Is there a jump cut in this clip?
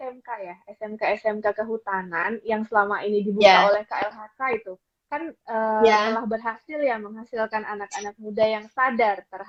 no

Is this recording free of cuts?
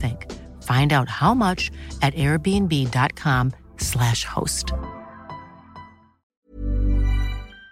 no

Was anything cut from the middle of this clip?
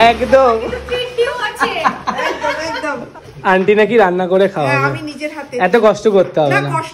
no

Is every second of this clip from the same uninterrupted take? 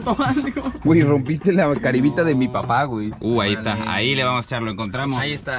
no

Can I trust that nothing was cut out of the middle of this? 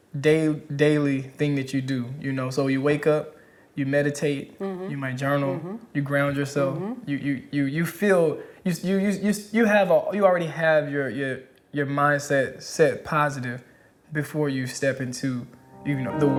yes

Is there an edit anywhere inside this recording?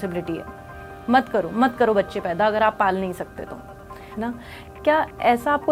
yes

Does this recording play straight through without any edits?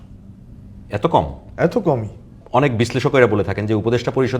no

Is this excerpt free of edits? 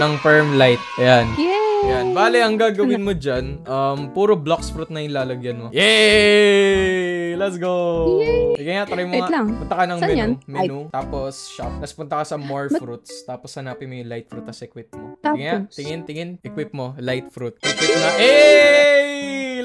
no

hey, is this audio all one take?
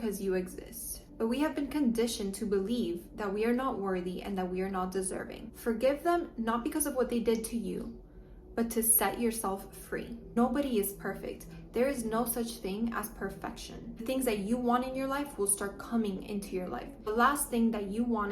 no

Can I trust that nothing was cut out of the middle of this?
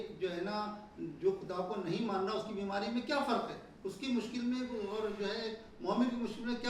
yes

